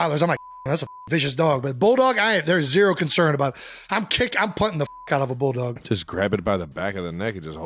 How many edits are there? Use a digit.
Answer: 1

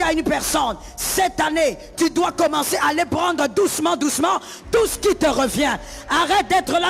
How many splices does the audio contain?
0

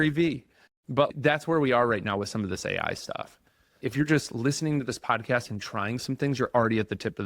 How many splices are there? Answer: 2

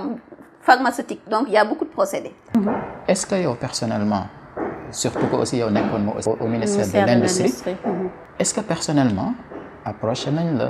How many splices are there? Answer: 3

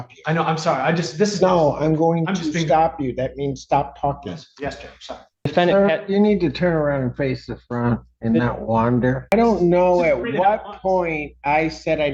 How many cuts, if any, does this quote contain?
2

